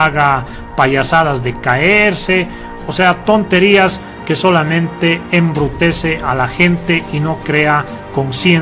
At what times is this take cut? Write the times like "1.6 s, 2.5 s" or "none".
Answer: none

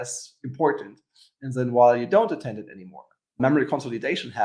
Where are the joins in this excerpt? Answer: 3.4 s

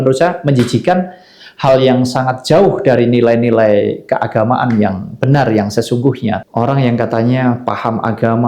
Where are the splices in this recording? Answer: 6.4 s

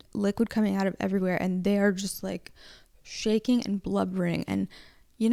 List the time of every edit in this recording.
none

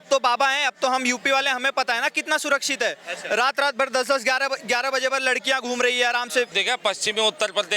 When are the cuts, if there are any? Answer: 6.5 s

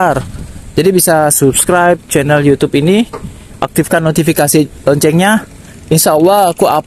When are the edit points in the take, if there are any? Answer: none

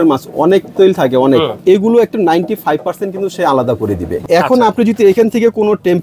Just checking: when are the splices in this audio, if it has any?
1.5 s, 4.2 s

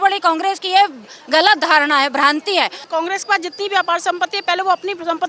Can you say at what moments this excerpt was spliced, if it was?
2.8 s

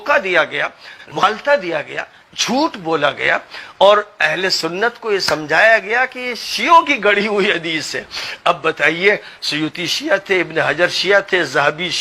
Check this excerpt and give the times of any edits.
1.2 s

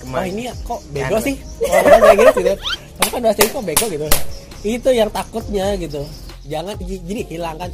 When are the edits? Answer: 6.2 s

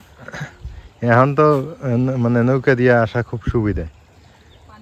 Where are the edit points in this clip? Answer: none

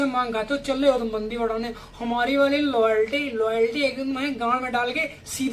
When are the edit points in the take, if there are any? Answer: none

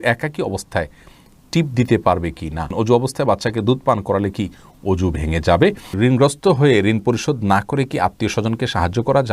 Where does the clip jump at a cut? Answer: 2.7 s, 5.9 s

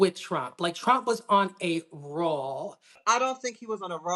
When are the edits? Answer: 3.0 s

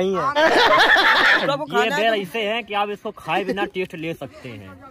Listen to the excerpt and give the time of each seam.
1.4 s

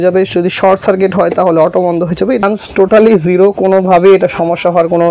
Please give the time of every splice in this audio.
2.4 s

